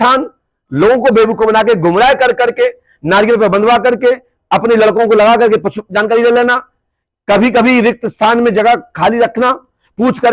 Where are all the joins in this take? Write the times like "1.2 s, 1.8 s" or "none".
none